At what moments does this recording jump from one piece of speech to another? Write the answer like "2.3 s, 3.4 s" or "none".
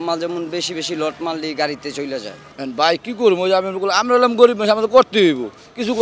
2.4 s